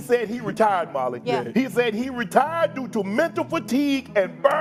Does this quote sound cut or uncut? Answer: uncut